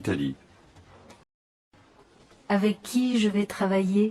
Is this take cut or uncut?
cut